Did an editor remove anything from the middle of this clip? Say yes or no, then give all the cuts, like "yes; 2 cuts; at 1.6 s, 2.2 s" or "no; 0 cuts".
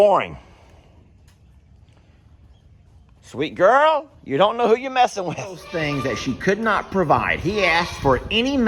yes; 1 cut; at 5.7 s